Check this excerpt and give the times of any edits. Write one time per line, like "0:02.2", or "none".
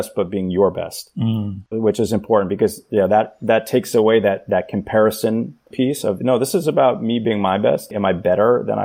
0:01.7
0:05.7
0:07.9